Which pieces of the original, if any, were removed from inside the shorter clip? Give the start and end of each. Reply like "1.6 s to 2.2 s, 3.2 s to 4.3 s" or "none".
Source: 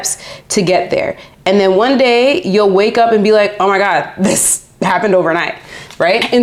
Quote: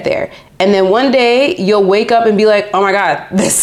none